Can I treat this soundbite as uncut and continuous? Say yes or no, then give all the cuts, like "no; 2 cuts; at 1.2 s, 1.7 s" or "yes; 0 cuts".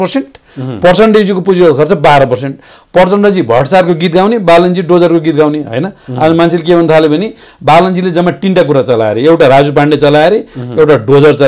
yes; 0 cuts